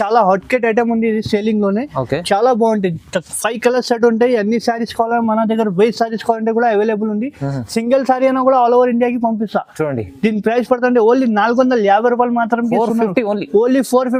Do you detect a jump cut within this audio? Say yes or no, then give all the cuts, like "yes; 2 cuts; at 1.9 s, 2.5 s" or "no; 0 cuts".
no; 0 cuts